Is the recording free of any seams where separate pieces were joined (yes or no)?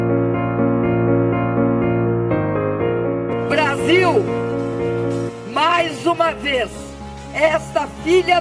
yes